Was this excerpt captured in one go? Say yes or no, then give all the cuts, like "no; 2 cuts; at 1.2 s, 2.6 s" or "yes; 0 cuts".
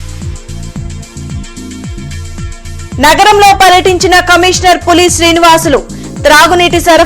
yes; 0 cuts